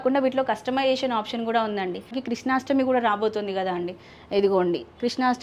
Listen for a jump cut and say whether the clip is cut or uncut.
cut